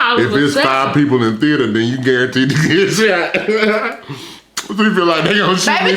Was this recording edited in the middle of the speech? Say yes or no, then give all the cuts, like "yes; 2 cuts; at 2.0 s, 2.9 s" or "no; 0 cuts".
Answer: no; 0 cuts